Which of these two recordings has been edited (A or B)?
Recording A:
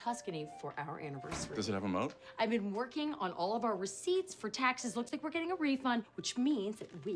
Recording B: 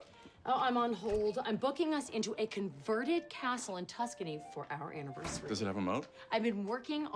A